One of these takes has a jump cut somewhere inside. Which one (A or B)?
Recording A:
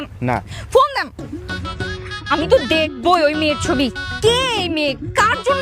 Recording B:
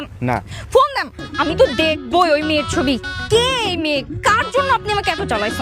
B